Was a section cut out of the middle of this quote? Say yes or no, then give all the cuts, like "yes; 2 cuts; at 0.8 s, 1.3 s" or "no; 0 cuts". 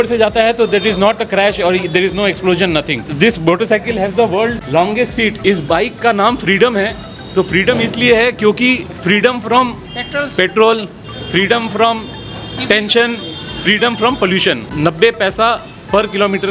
yes; 3 cuts; at 3.1 s, 5.4 s, 14.7 s